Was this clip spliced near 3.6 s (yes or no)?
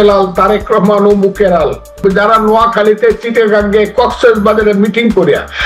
no